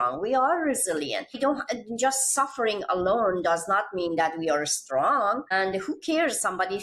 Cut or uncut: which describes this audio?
cut